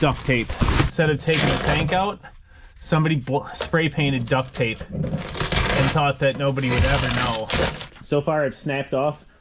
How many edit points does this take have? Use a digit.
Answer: 2